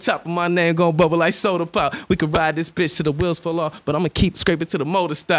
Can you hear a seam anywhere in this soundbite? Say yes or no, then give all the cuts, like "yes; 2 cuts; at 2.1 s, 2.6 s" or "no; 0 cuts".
yes; 1 cut; at 4.3 s